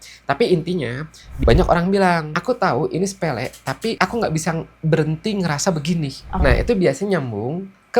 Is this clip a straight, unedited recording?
no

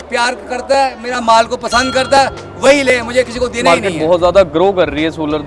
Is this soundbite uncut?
no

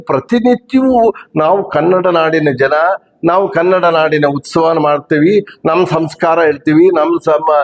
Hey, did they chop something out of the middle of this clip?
no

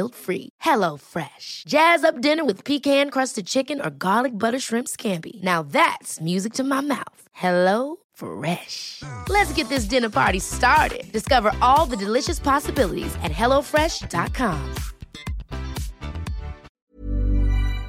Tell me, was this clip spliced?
yes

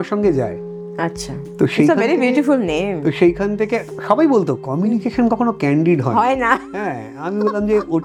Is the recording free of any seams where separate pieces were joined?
yes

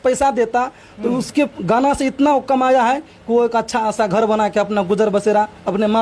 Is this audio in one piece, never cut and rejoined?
yes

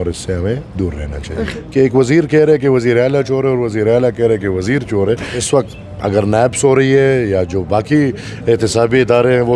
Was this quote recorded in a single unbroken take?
no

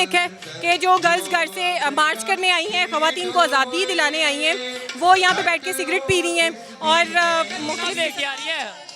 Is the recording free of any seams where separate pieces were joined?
no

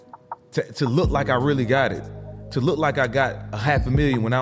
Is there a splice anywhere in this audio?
no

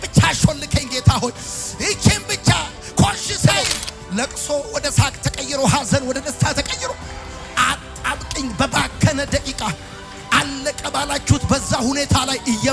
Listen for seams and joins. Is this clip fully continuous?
no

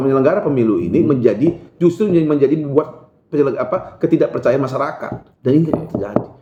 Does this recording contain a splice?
no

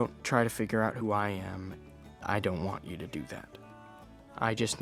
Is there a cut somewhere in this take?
no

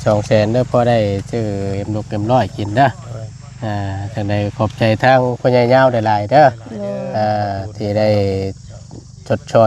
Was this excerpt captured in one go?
yes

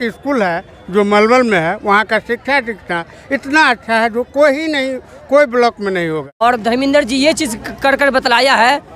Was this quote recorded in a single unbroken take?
no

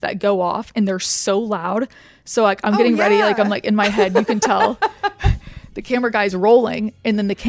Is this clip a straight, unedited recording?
yes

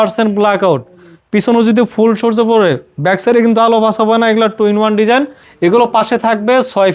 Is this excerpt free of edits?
no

